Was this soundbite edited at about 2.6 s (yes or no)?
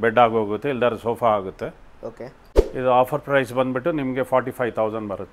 yes